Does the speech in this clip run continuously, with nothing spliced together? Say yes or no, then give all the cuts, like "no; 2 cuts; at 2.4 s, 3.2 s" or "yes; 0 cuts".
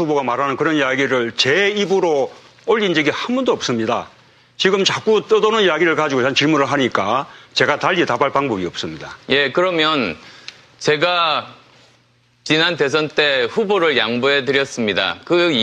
yes; 0 cuts